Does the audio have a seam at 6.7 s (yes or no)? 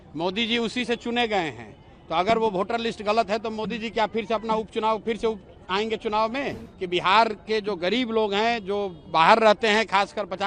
yes